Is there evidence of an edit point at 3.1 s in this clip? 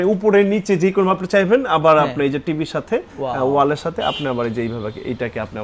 no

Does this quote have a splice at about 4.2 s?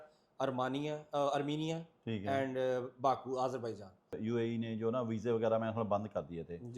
yes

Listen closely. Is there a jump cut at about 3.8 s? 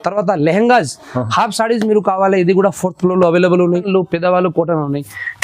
yes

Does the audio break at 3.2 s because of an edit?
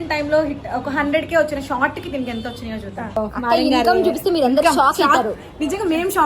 yes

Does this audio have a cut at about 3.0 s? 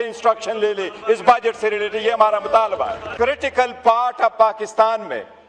yes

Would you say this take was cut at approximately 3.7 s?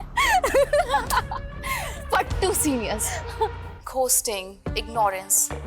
yes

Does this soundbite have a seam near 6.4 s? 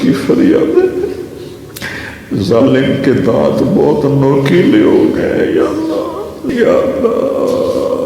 yes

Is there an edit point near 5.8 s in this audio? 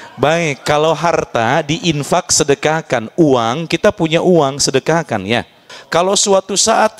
yes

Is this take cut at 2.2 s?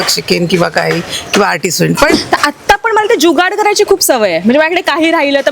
yes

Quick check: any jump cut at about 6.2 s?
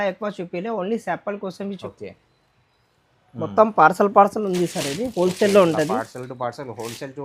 no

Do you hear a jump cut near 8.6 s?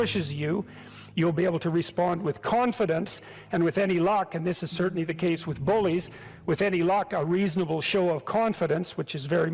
no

